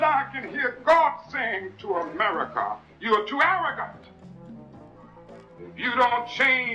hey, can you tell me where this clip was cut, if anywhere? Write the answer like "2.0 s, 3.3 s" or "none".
none